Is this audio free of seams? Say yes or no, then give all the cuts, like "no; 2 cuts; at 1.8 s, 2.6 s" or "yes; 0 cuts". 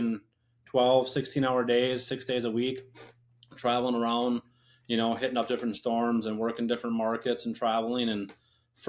yes; 0 cuts